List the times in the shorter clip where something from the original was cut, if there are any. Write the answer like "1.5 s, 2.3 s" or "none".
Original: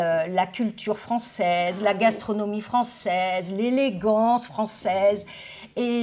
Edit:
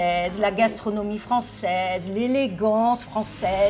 none